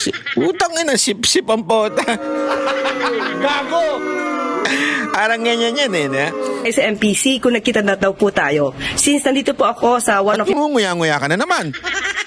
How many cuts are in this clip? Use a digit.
1